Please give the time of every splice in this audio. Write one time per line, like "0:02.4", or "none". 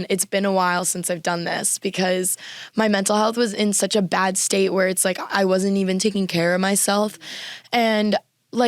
none